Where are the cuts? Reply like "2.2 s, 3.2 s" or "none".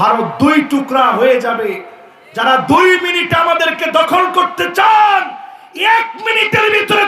none